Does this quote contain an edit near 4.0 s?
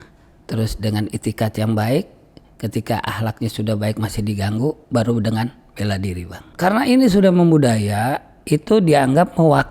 no; 1 cut; at 6.4 s

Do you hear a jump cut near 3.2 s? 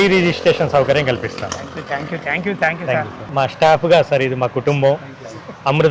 yes; 1 cut; at 3.2 s

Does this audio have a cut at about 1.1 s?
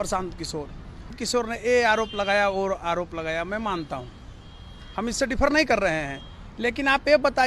yes; 1 cut; at 1.1 s

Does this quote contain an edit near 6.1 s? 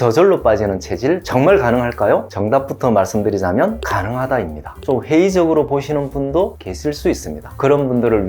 no; 2 cuts; at 4.8 s, 7.4 s

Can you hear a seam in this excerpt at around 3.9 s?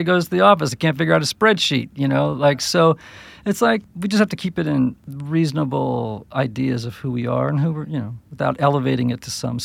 yes; 2 cuts; at 3.9 s, 5.1 s

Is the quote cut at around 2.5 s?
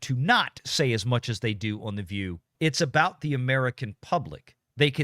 yes; 1 cut; at 2.5 s

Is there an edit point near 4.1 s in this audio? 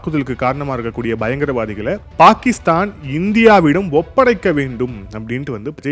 no; 1 cut; at 2.1 s

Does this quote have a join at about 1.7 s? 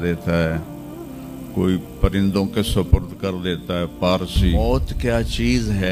no; 1 cut; at 4.6 s

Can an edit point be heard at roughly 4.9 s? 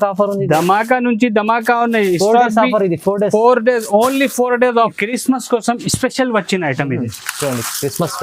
yes; 1 cut; at 4.9 s

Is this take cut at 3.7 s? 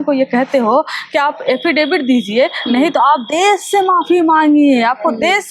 no; 0 cuts

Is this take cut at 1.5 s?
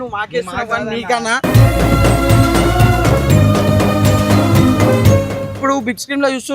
no; 1 cut; at 5.6 s

